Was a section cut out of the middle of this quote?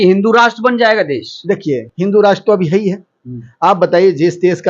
no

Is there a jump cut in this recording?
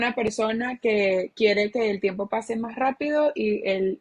no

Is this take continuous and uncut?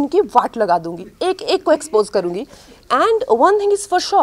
yes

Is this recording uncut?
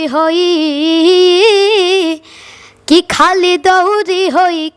yes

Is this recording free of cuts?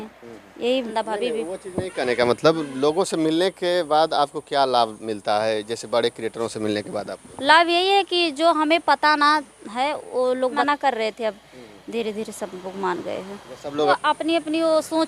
no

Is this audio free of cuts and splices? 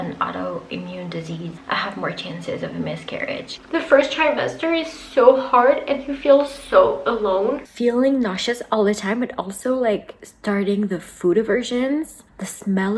no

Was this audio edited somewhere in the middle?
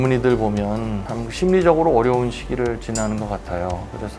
no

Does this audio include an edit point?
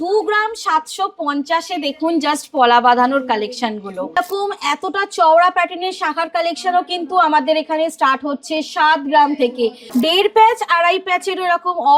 yes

